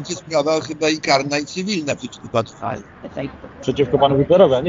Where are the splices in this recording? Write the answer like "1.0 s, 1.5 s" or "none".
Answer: none